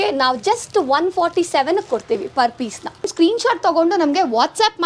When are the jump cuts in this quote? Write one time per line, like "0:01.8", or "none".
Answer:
0:03.1